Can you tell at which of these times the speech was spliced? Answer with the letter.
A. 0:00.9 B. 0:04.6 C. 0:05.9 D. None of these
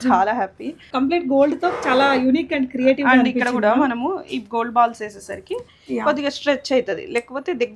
A